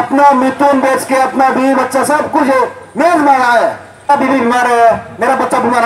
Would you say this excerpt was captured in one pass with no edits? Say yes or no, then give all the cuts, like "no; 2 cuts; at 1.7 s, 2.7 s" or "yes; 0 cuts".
no; 1 cut; at 4.1 s